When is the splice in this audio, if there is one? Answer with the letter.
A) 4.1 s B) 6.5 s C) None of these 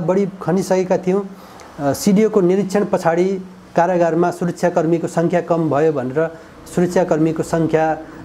C